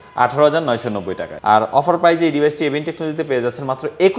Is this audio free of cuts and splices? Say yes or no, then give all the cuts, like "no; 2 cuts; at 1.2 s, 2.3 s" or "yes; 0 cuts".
no; 1 cut; at 1.2 s